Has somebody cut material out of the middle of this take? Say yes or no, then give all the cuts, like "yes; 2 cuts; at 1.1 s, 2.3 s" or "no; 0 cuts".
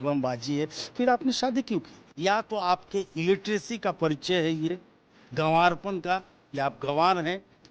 yes; 1 cut; at 2.1 s